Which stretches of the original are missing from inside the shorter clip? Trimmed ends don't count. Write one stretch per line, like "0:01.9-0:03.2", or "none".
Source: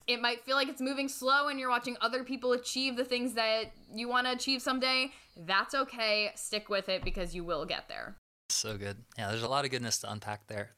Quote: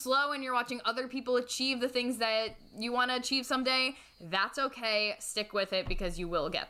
none